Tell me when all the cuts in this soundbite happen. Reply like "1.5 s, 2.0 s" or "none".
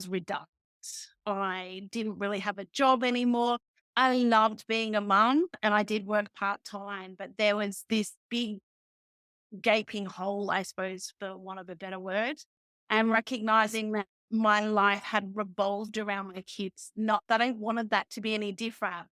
none